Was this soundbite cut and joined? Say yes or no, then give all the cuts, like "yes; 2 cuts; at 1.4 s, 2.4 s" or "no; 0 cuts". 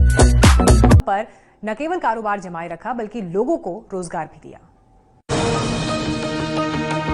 yes; 1 cut; at 1.0 s